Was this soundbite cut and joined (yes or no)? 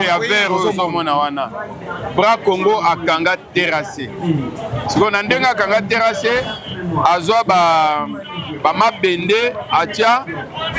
no